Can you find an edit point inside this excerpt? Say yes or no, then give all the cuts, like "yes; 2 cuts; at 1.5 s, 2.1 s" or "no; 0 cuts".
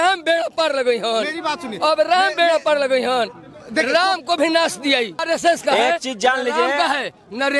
yes; 1 cut; at 5.2 s